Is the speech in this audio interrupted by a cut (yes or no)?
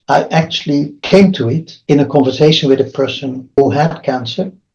yes